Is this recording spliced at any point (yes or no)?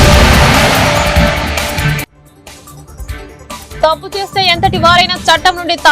no